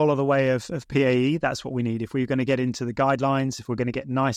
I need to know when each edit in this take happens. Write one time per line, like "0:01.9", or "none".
none